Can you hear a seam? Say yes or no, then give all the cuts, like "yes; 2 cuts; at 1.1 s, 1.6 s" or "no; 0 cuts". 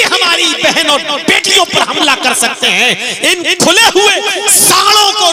no; 0 cuts